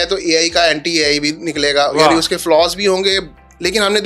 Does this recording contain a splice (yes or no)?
no